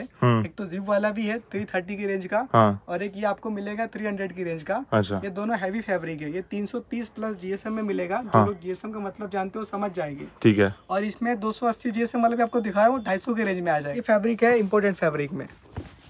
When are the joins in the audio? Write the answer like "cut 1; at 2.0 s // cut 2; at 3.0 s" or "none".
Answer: cut 1; at 14.0 s